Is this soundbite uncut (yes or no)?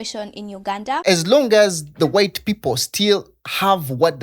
no